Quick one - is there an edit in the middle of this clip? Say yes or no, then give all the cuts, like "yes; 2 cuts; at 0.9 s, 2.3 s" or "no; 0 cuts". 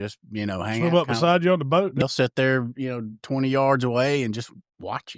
yes; 1 cut; at 2.0 s